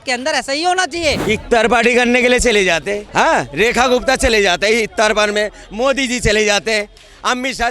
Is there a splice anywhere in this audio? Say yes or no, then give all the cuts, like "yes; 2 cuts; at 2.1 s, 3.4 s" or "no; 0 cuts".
yes; 1 cut; at 1.2 s